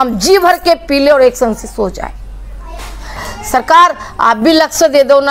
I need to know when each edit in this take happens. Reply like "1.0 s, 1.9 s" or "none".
3.2 s